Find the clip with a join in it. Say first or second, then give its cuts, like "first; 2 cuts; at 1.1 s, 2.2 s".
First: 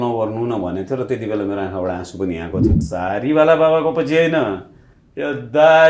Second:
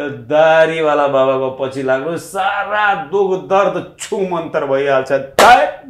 first; 1 cut; at 2.8 s